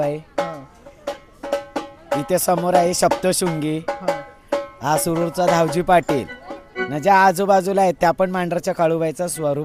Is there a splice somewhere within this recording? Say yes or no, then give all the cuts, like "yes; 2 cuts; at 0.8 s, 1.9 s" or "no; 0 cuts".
no; 0 cuts